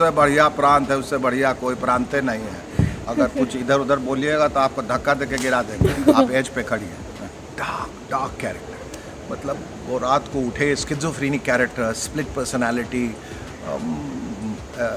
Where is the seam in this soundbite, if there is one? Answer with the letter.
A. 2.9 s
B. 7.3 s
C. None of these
B